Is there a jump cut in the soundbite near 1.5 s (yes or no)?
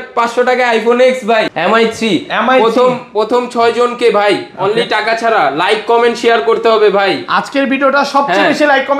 yes